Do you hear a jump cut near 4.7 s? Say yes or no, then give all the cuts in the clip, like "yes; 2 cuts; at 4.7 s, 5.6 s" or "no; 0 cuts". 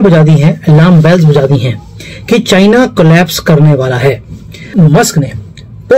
yes; 1 cut; at 4.7 s